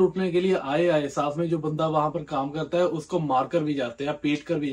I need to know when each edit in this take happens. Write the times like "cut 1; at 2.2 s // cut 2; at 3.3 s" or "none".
none